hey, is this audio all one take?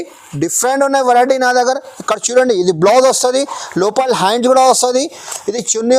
yes; 0 cuts

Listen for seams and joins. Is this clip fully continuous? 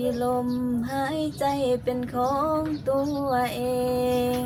yes; 0 cuts

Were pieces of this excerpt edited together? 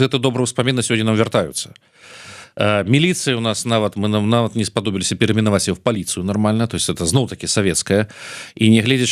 no; 0 cuts

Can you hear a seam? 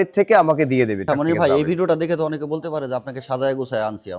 yes; 1 cut; at 1.1 s

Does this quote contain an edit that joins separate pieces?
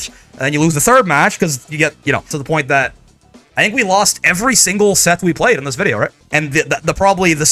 yes; 2 cuts; at 2.3 s, 6.2 s

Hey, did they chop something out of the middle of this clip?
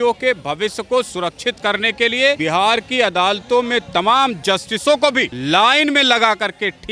yes; 2 cuts; at 2.4 s, 5.3 s

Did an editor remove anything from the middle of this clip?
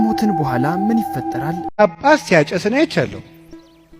yes; 1 cut; at 1.6 s

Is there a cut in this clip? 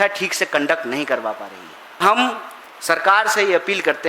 yes; 1 cut; at 2.0 s

